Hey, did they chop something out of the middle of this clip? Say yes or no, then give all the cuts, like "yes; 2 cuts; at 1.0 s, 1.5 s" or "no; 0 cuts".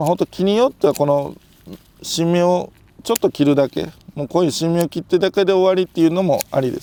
no; 0 cuts